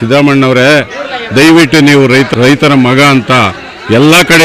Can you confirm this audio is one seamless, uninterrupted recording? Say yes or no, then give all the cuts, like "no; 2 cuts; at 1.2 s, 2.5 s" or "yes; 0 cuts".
yes; 0 cuts